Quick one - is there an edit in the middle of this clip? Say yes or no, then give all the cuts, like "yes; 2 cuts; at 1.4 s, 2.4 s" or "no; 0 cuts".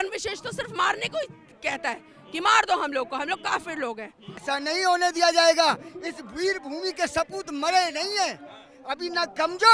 yes; 1 cut; at 4.4 s